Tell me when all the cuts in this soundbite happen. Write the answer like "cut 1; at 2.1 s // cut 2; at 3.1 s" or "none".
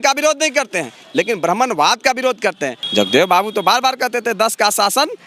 cut 1; at 2.8 s